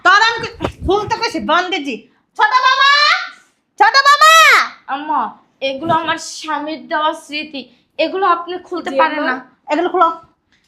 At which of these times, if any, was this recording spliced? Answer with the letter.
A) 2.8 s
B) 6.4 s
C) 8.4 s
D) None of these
D